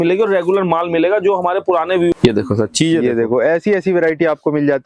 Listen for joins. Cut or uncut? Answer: cut